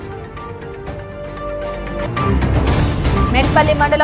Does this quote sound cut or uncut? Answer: cut